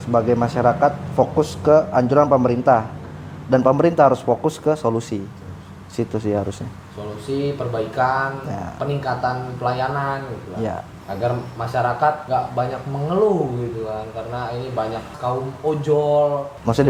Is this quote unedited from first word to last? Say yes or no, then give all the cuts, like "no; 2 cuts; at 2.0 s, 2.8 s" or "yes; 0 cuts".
yes; 0 cuts